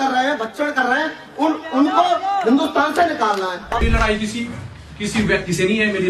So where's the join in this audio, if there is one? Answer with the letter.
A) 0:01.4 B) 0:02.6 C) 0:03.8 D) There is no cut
C